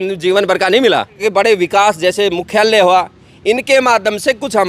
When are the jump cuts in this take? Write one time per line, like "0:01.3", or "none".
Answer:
0:01.1